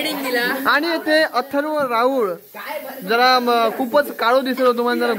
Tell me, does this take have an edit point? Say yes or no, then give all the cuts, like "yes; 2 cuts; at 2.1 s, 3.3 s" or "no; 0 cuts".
no; 0 cuts